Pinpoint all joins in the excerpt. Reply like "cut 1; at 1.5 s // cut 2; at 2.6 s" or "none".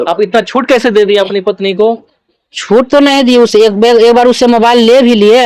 none